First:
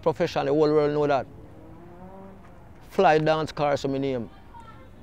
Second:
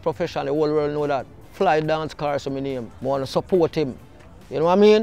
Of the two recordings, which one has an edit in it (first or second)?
second